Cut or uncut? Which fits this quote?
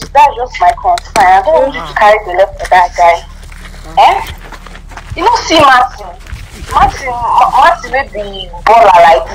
uncut